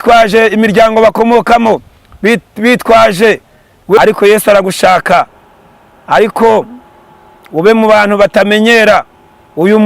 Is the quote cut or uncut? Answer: cut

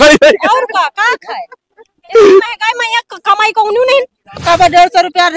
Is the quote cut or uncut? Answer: cut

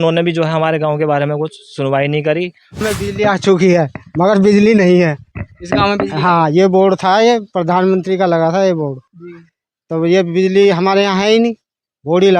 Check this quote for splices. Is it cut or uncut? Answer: cut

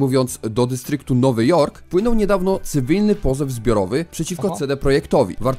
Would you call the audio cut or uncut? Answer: cut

